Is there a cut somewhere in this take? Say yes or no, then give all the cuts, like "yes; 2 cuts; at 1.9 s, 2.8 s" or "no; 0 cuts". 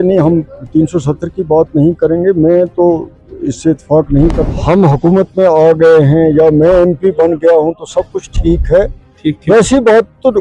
yes; 1 cut; at 4.6 s